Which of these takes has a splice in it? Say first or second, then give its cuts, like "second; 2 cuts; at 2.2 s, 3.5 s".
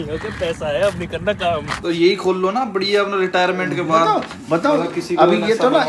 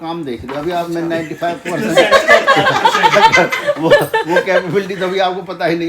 first; 1 cut; at 1.7 s